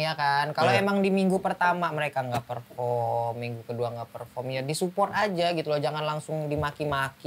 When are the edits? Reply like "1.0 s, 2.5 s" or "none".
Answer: none